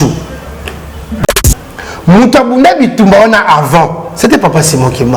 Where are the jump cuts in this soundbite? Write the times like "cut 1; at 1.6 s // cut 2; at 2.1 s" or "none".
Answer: cut 1; at 1.2 s